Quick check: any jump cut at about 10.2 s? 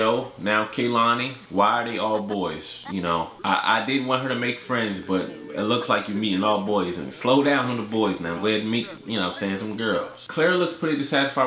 yes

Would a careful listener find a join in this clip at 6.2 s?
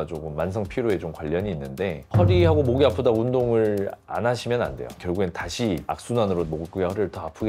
no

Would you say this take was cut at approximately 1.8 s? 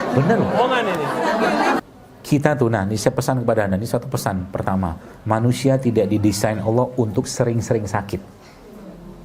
yes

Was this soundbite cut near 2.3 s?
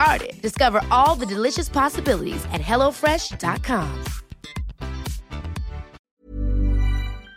no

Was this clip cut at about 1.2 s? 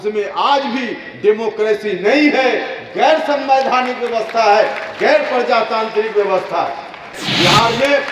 no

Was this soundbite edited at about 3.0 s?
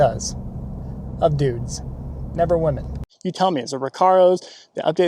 yes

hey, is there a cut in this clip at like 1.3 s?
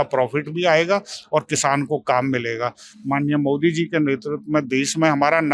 no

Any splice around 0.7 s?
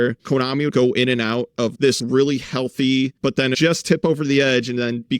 yes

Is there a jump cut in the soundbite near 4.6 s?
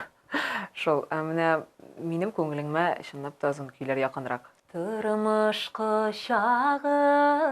yes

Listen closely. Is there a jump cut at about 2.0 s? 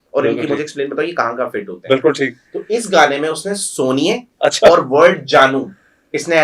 no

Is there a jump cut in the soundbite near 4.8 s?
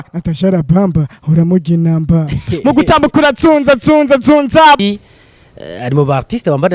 yes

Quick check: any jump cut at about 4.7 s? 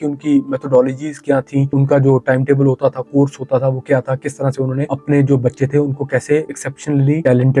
no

